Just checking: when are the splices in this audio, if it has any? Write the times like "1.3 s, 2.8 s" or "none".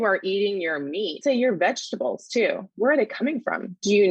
1.2 s